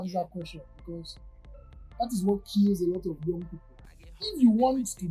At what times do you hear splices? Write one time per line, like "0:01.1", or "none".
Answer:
0:04.0

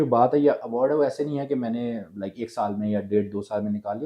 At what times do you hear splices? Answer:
none

